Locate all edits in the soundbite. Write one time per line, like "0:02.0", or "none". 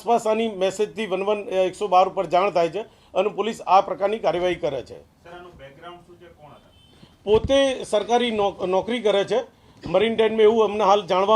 none